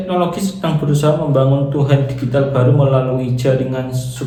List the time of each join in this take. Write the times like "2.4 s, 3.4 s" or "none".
none

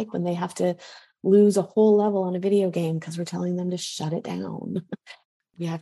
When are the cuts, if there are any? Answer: none

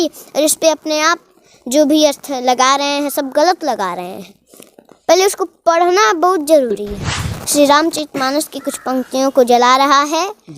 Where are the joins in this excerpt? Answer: 7.3 s

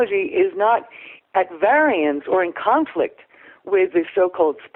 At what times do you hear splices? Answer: none

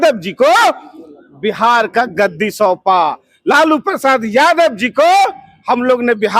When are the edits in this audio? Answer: none

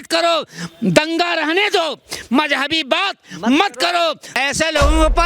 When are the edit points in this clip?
4.3 s

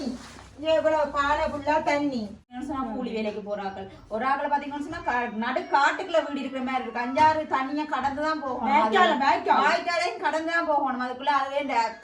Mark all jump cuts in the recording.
2.5 s

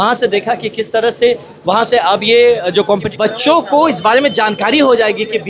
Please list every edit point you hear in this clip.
3.1 s

